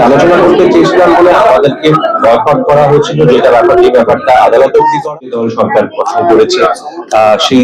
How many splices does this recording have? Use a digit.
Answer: 1